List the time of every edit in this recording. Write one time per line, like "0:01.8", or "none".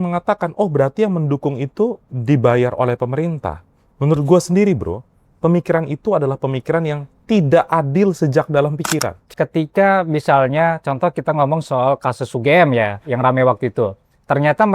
0:09.2